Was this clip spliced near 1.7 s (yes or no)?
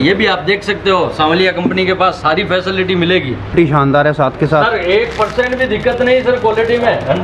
no